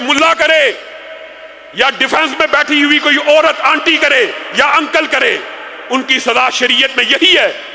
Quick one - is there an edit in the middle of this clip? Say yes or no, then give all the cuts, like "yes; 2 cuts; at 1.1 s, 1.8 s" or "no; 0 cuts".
no; 0 cuts